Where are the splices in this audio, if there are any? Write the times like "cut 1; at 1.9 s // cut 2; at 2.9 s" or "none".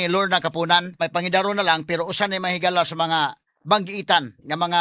cut 1; at 1.0 s